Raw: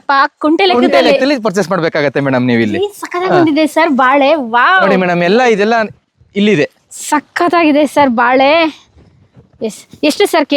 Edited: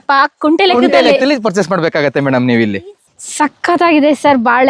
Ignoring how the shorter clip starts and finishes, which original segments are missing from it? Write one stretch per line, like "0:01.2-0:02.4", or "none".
0:03.1-0:06.8